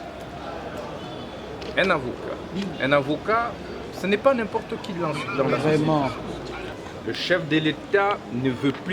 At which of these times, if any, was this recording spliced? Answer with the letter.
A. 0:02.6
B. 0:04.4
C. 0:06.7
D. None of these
C